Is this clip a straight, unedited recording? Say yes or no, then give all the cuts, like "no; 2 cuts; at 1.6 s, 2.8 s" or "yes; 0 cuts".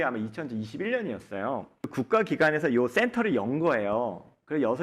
no; 1 cut; at 1.8 s